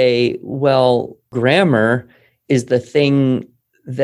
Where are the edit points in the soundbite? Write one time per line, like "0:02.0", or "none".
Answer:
0:01.2